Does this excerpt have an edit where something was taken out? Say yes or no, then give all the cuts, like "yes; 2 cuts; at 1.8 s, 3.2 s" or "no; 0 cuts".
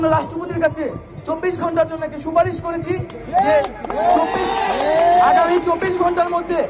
no; 0 cuts